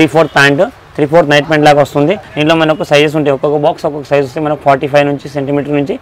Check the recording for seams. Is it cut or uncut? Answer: cut